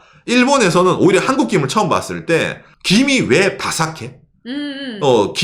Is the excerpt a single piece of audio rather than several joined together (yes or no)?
yes